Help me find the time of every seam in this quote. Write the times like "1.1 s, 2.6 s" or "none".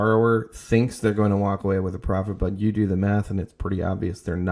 none